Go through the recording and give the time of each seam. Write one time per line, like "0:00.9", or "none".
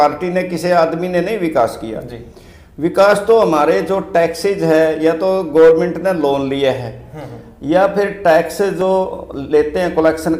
none

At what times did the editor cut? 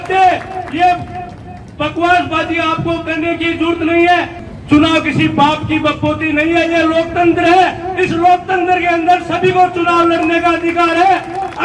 0:04.4

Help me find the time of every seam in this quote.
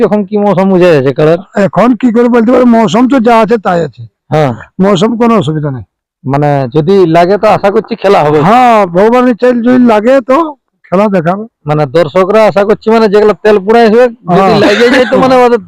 none

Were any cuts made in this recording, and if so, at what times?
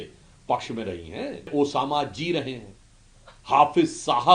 0:01.5

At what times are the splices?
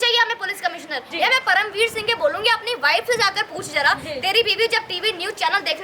0:01.1

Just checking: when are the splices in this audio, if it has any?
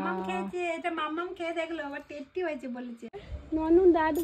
0:03.2

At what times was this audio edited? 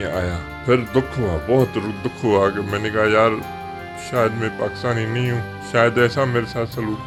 none

